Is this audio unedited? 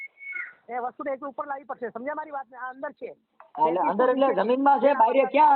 yes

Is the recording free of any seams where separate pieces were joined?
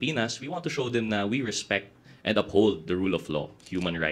yes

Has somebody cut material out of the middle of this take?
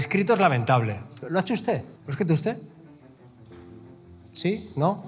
yes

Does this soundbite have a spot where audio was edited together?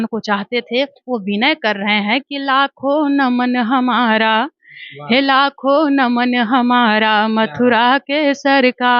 no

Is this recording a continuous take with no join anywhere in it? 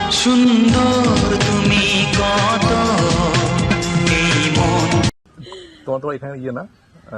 yes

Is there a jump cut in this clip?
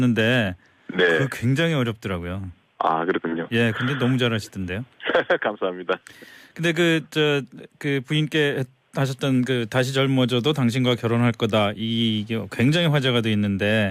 yes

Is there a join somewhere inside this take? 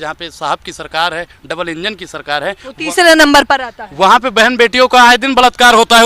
no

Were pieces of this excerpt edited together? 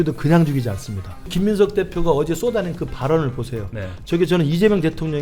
yes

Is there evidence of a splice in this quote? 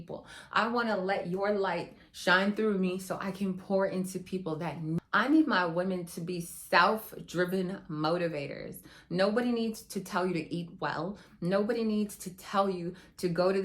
yes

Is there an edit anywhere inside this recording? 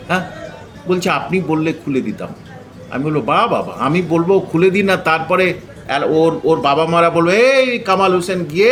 no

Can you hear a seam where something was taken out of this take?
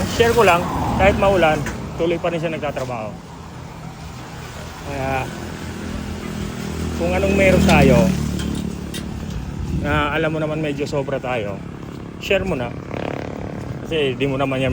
no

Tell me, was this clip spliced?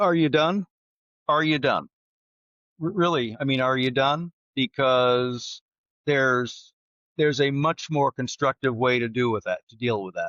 no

